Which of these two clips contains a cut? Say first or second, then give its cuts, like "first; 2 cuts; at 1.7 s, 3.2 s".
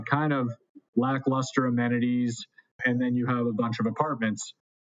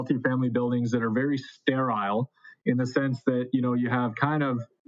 first; 1 cut; at 2.8 s